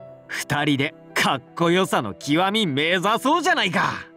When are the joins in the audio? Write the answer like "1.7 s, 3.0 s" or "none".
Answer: none